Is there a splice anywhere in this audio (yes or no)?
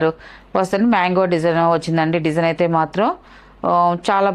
no